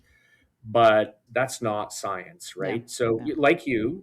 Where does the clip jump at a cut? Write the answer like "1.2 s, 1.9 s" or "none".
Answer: 1.2 s